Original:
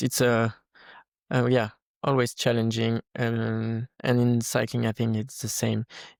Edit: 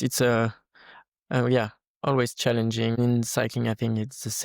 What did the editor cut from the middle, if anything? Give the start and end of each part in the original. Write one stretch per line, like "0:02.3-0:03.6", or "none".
0:03.0-0:04.2